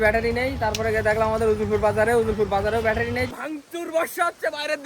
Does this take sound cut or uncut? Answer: cut